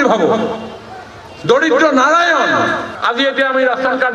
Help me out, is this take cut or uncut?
cut